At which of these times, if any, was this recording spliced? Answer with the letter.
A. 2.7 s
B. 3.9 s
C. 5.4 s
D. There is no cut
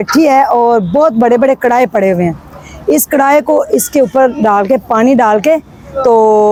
D